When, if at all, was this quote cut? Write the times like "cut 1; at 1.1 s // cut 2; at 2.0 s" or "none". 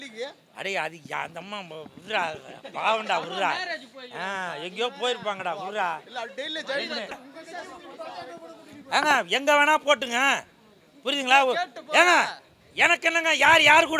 cut 1; at 7.2 s